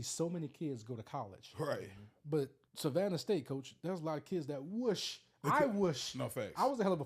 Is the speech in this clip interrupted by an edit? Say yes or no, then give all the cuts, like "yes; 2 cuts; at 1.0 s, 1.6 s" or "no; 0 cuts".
yes; 1 cut; at 2.6 s